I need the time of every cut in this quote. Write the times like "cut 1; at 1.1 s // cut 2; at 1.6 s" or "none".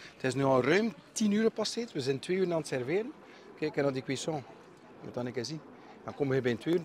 none